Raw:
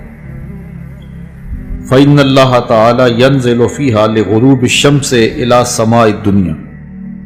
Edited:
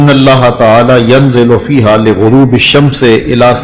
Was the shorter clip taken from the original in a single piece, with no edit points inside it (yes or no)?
yes